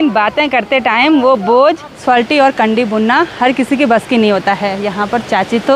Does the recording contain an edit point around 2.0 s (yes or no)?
yes